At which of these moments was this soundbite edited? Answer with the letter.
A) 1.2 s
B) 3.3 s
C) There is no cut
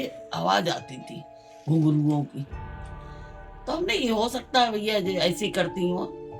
C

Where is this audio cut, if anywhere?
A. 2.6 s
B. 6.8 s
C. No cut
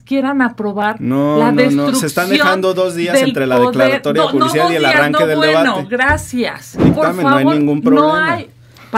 B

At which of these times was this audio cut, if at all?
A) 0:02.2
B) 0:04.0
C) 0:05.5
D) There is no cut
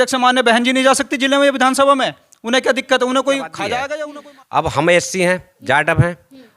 B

